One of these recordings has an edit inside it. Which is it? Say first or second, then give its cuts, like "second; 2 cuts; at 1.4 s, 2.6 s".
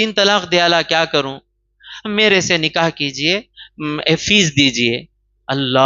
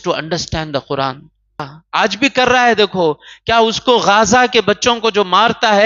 second; 1 cut; at 1.7 s